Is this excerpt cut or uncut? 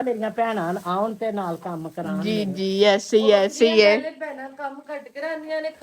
uncut